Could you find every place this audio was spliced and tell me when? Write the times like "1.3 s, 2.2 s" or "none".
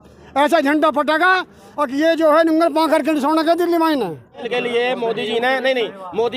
4.5 s